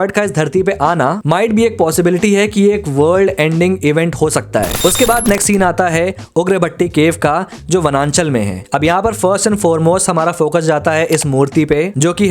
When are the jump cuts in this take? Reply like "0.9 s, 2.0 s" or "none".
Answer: 4.8 s, 8.6 s